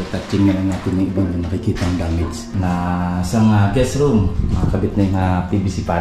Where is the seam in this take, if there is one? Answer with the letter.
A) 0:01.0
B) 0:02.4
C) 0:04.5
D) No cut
B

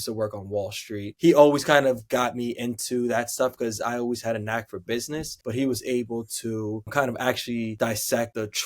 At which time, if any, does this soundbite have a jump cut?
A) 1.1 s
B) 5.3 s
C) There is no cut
A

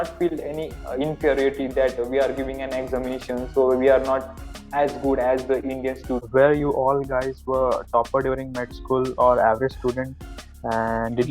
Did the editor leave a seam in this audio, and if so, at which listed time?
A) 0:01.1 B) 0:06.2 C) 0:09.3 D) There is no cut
B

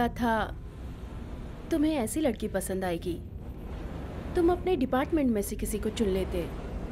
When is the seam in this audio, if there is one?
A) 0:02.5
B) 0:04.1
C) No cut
B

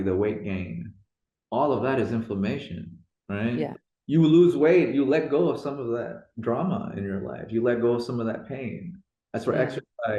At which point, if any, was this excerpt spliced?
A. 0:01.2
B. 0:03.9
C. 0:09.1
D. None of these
B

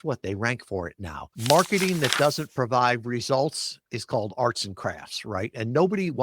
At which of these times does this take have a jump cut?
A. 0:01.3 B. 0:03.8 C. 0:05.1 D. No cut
A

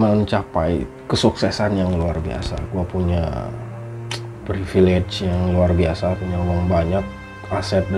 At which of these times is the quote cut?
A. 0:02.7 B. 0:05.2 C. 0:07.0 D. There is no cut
D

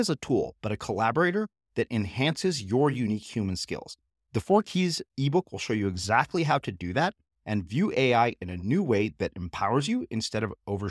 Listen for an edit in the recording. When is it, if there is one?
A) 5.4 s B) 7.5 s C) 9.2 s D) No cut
D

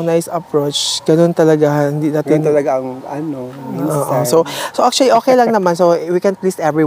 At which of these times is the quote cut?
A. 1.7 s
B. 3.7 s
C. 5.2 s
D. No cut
D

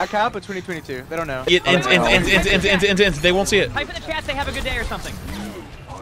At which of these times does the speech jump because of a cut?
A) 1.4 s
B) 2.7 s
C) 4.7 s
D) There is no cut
A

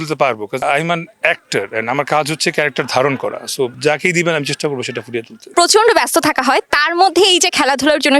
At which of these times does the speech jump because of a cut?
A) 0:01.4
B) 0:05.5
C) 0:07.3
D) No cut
D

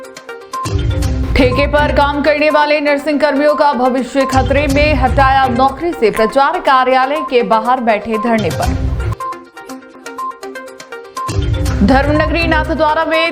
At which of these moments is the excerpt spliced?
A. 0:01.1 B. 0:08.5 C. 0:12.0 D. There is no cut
A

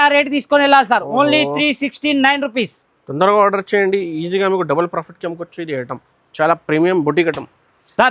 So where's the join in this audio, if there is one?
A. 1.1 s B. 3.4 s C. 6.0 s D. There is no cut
D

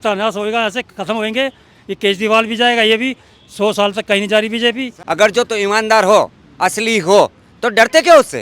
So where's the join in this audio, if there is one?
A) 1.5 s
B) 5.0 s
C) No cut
B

